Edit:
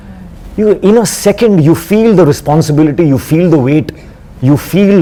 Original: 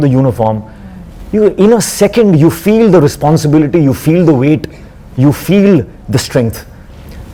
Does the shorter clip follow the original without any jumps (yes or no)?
yes